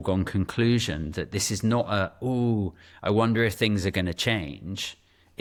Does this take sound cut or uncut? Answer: uncut